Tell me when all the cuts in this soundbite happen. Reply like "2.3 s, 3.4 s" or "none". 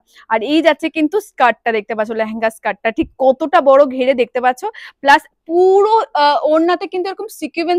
none